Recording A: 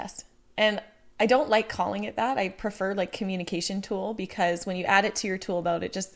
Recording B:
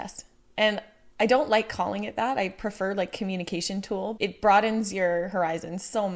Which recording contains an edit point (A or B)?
B